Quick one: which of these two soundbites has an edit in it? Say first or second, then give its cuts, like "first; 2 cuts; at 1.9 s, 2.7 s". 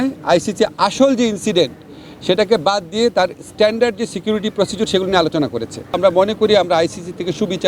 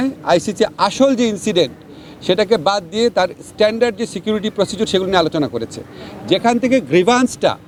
first; 1 cut; at 6.0 s